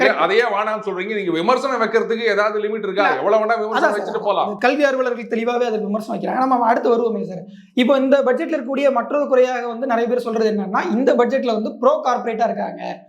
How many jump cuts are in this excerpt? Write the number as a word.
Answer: zero